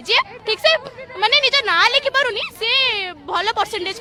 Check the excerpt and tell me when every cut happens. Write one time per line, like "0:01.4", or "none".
none

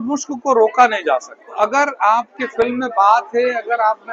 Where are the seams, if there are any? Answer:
0:01.5

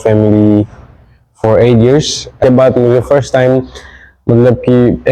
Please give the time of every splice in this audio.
0:02.4

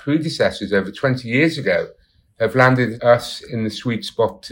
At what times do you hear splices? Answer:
0:02.9

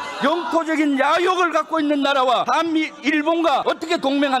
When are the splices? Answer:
0:02.5
0:03.6

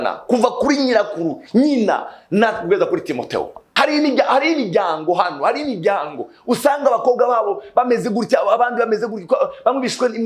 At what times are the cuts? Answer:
0:03.6

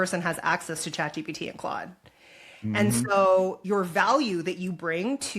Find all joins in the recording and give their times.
0:03.6

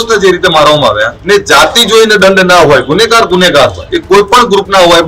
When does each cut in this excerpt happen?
0:01.1
0:03.9

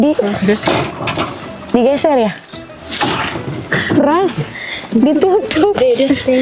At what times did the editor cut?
0:03.6

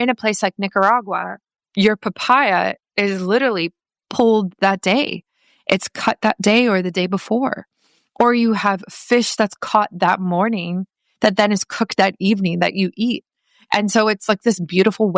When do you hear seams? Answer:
0:01.6
0:04.0

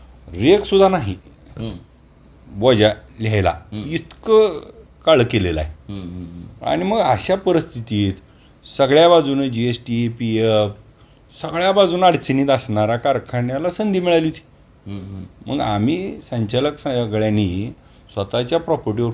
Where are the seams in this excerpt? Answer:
none

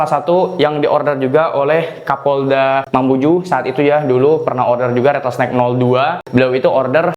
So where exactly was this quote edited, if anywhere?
0:06.2

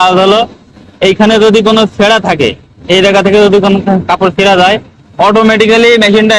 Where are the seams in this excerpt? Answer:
none

